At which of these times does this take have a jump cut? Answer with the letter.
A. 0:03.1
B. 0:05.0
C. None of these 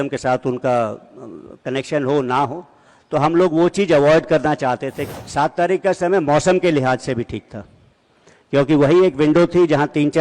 B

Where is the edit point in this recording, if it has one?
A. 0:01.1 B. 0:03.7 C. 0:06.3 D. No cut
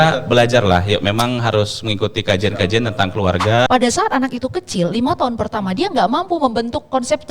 B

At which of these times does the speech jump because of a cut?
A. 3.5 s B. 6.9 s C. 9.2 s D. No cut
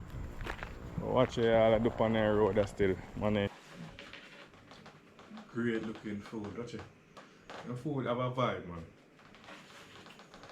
A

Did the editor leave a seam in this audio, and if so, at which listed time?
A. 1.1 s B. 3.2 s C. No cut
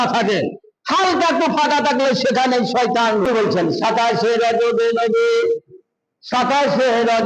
B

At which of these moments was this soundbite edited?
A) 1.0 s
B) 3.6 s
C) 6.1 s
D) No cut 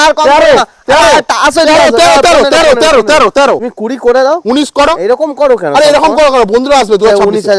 B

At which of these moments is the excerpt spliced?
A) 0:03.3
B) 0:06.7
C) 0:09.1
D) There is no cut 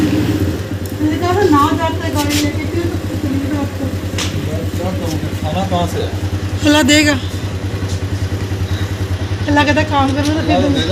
D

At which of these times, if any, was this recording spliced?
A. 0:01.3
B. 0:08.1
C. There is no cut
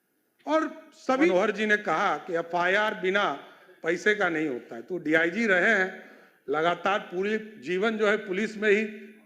A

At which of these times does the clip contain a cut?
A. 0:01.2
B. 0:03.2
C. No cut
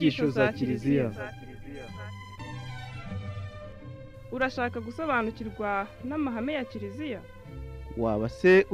C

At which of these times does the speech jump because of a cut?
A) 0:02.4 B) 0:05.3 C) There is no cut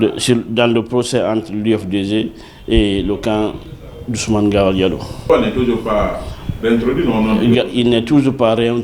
B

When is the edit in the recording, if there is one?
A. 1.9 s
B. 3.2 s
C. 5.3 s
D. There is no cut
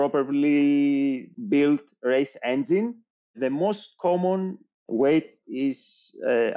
C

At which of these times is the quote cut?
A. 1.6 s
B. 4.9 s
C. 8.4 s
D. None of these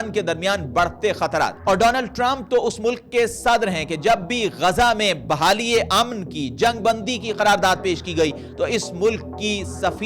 A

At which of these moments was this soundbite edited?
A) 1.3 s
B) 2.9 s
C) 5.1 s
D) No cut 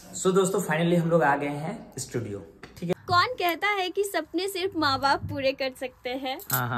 B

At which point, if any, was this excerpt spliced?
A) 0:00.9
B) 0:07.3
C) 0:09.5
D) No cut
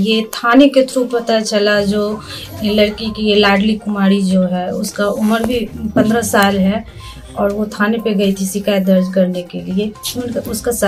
D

